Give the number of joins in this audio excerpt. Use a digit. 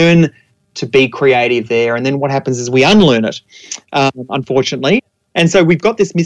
1